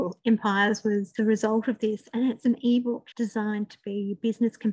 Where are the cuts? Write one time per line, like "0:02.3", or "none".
0:01.1
0:03.1